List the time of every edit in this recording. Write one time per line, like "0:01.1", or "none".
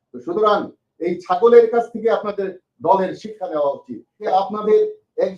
0:04.3

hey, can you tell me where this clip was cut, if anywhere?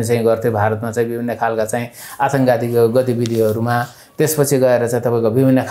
none

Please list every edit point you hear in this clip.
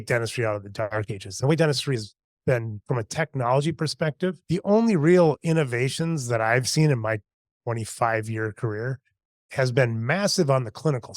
0:00.9

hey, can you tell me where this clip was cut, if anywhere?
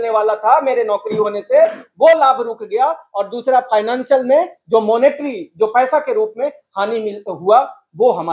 none

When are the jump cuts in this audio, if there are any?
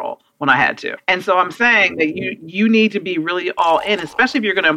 0:01.0

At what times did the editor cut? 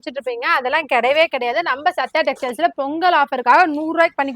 none

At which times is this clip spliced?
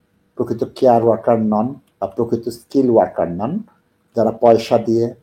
none

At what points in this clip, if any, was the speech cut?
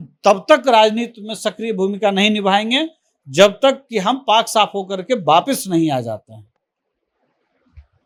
none

